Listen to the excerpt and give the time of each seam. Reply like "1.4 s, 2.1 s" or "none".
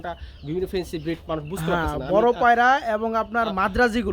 none